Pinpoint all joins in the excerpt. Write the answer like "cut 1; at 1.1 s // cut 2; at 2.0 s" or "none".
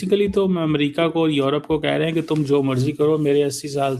none